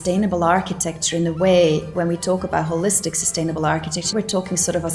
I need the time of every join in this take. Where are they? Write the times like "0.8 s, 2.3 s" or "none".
1.9 s, 4.1 s